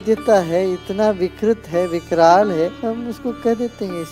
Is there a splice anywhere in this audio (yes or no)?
yes